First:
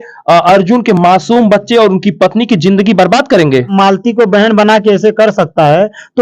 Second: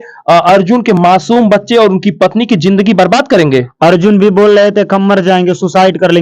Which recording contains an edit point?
first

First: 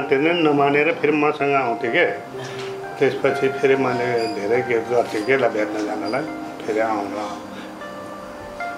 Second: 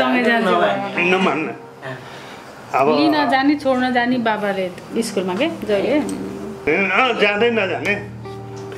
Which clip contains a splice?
second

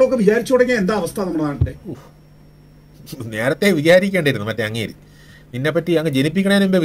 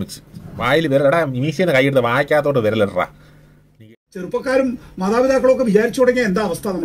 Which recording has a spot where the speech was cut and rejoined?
second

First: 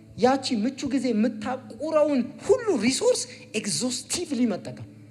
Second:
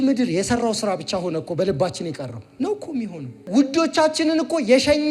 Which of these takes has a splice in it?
second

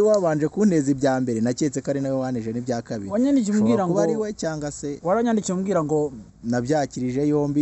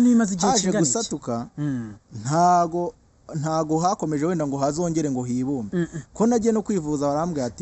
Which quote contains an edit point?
first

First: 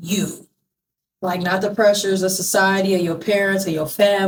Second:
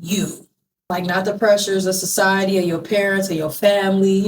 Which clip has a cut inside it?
second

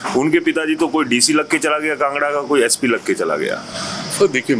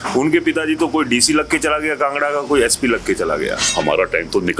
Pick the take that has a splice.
second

